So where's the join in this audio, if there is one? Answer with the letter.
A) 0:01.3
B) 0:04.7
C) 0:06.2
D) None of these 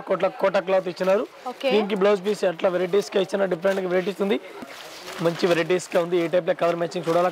B